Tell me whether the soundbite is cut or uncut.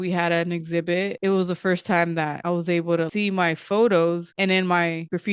cut